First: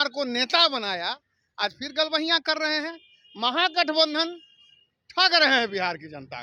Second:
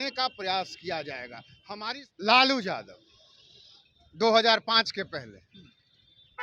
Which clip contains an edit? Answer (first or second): second